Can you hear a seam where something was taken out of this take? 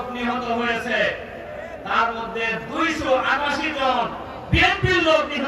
no; 0 cuts

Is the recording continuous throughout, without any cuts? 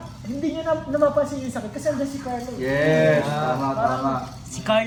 yes; 0 cuts

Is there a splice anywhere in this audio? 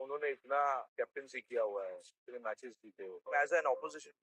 yes; 2 cuts; at 0.9 s, 3.2 s

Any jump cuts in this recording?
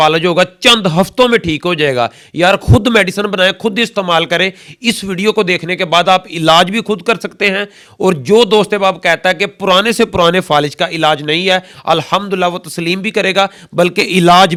no; 0 cuts

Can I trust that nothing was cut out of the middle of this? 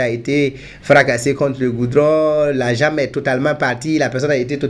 yes; 0 cuts

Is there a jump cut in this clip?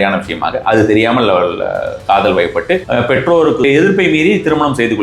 yes; 2 cuts; at 2.8 s, 3.6 s

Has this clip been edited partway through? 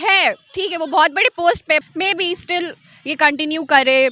yes; 1 cut; at 1.8 s

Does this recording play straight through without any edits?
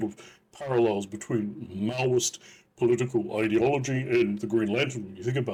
yes; 0 cuts

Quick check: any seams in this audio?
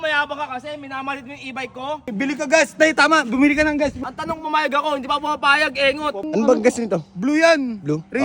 yes; 3 cuts; at 2.1 s, 4.0 s, 6.2 s

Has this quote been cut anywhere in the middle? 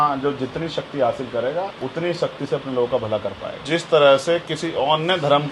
yes; 2 cuts; at 1.8 s, 3.6 s

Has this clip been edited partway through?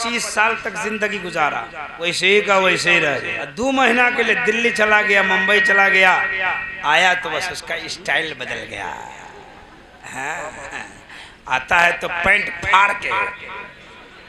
yes; 2 cuts; at 1.8 s, 3.4 s

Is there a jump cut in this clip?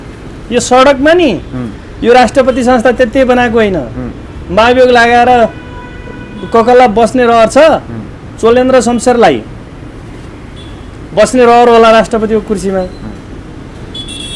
no; 0 cuts

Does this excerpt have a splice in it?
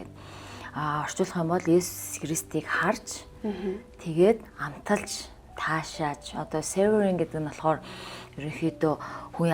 no; 0 cuts

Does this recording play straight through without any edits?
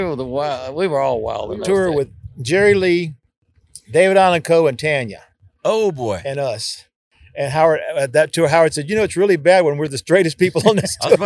no; 1 cut; at 1.5 s

